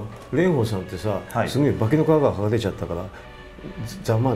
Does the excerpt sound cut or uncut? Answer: uncut